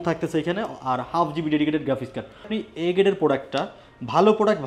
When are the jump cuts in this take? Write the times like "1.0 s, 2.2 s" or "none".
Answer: 2.5 s